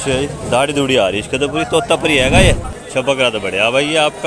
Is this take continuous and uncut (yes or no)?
no